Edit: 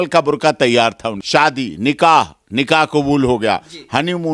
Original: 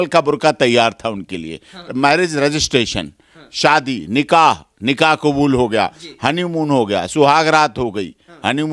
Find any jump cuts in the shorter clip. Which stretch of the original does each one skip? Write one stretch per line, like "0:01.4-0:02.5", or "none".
0:01.1-0:03.4